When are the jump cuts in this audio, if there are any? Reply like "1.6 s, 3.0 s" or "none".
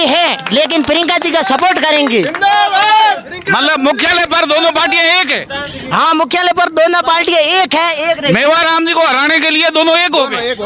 none

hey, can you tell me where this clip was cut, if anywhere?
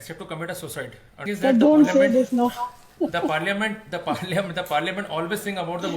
1.3 s

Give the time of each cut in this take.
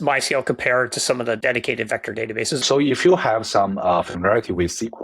1.4 s, 2.6 s

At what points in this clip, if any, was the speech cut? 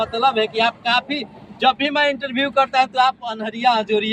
none

